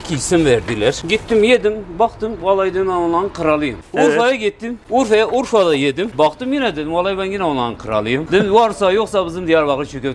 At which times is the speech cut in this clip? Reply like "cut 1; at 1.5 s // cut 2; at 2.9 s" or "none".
cut 1; at 1.0 s // cut 2; at 3.8 s // cut 3; at 4.7 s // cut 4; at 6.1 s // cut 5; at 8.2 s